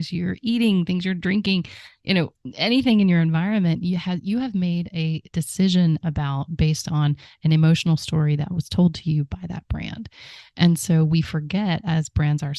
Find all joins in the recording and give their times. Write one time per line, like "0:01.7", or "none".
none